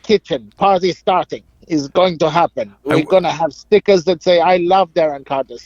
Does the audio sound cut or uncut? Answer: uncut